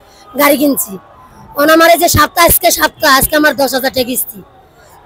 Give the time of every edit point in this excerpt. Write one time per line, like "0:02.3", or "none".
none